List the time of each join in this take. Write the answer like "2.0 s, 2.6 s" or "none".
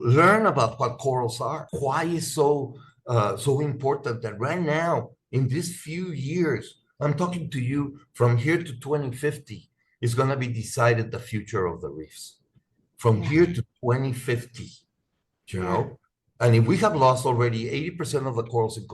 1.7 s